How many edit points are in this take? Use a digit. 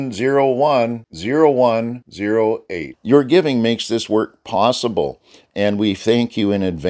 0